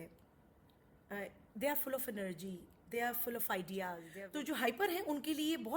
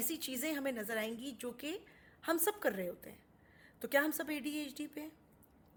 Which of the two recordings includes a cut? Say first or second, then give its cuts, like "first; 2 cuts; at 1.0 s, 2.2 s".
first; 1 cut; at 4.1 s